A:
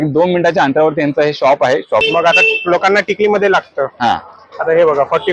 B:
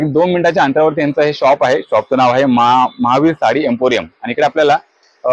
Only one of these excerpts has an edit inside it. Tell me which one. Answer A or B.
A